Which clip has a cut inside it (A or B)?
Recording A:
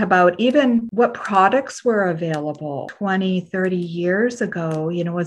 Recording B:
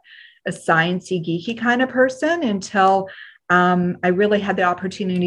A